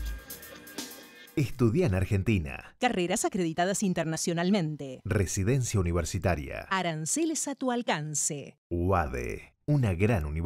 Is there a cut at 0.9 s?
yes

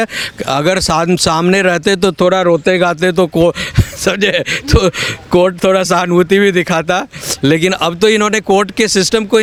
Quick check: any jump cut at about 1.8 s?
no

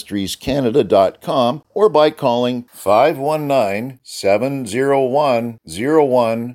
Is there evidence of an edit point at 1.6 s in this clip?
yes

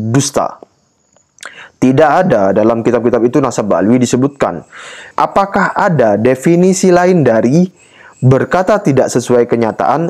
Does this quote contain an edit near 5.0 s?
yes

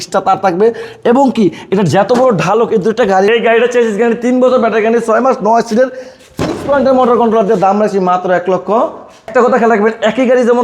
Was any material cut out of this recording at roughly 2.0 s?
no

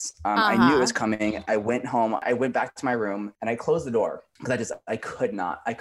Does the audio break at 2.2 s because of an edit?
yes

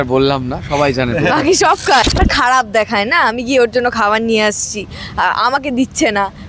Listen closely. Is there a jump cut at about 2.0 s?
yes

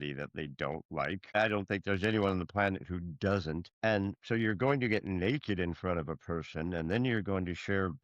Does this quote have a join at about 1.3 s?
yes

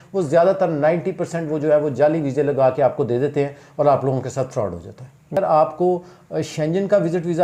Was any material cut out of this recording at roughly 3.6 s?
no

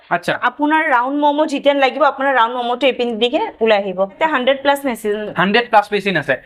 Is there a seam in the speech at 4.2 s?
yes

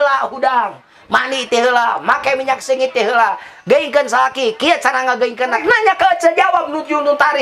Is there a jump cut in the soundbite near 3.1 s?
no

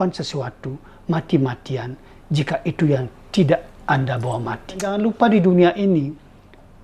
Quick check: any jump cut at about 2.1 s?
no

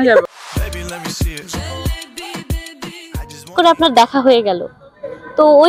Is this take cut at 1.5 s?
no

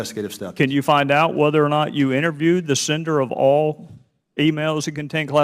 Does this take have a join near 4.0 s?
no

